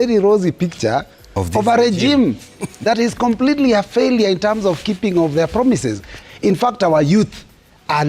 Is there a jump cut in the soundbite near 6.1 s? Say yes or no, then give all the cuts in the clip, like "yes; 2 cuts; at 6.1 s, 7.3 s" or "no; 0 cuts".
yes; 1 cut; at 6.1 s